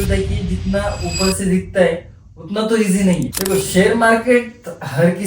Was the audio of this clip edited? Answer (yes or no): yes